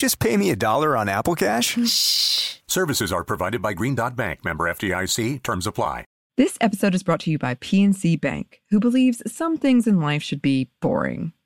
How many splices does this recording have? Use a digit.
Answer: 1